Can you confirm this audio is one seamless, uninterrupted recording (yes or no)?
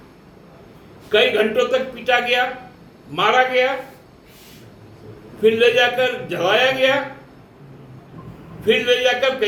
yes